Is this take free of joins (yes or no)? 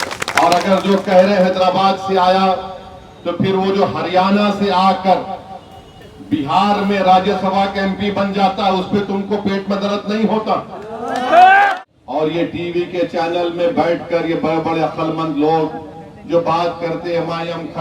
no